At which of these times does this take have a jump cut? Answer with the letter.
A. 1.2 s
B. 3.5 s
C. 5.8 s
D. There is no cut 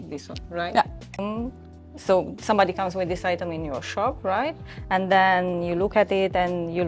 A